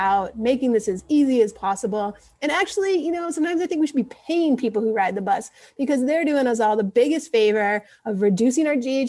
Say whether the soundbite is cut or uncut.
uncut